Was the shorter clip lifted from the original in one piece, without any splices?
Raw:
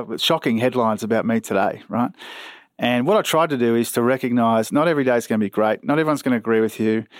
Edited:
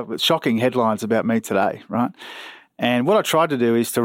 yes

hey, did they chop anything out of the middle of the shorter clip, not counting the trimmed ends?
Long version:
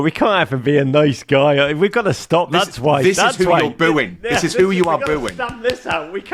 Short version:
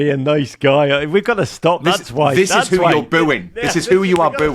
no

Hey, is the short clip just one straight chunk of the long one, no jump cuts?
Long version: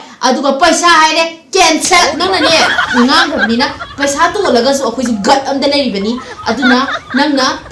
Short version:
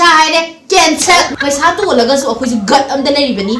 no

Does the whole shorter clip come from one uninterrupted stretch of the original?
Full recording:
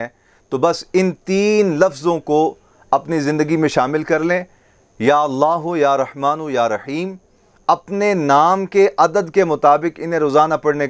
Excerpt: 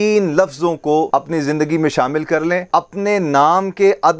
no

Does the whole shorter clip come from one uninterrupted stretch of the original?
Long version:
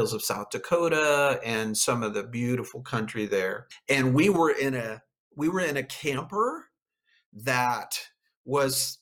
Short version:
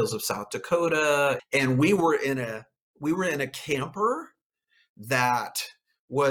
no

